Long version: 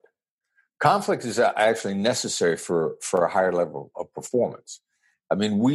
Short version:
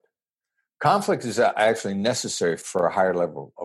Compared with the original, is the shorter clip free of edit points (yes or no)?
no